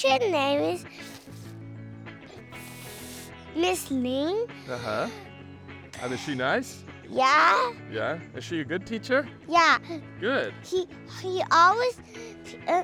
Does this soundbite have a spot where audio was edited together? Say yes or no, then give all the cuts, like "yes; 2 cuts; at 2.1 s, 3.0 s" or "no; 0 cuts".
no; 0 cuts